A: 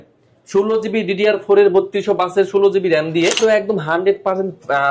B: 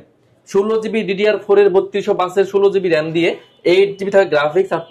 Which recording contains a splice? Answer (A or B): A